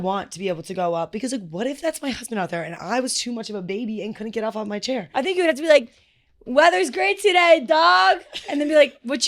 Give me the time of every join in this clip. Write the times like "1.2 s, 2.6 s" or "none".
5.3 s